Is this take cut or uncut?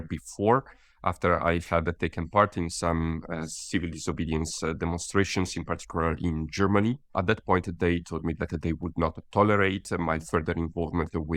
cut